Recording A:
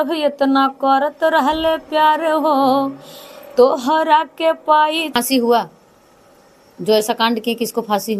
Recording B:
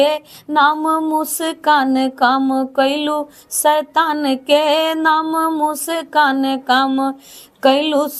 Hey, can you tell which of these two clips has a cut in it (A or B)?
A